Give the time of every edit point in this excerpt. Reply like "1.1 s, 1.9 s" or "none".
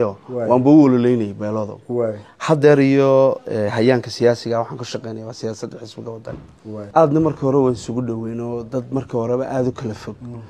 6.8 s